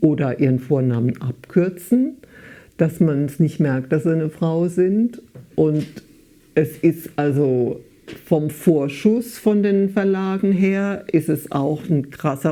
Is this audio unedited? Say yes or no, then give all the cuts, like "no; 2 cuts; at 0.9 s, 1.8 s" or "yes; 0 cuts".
yes; 0 cuts